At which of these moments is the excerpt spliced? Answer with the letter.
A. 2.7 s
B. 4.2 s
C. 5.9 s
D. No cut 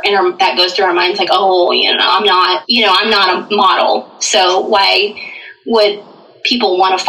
A